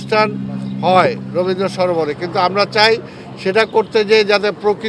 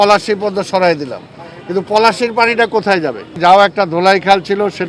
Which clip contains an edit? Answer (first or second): second